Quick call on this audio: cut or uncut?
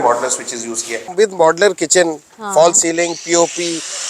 cut